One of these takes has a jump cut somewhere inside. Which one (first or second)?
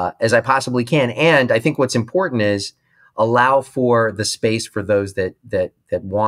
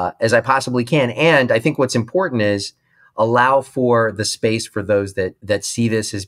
second